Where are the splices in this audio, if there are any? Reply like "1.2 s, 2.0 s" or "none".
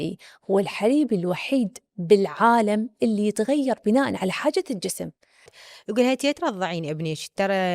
5.6 s